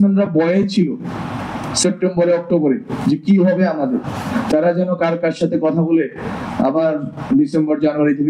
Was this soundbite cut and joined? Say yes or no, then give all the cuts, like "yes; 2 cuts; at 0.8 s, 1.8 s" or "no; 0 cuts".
no; 0 cuts